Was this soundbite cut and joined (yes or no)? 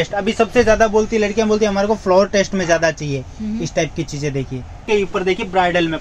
yes